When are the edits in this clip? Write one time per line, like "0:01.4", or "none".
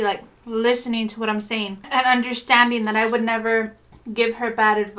0:01.8